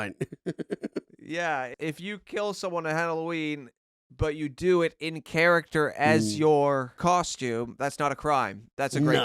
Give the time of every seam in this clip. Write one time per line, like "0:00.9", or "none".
0:01.7
0:07.0